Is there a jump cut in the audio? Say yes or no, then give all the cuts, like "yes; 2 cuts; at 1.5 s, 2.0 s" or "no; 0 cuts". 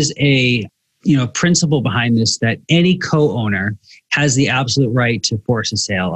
no; 0 cuts